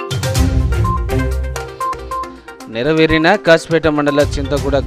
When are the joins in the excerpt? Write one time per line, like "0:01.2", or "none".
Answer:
0:01.1